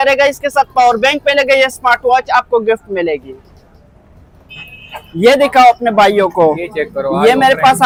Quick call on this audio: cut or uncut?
uncut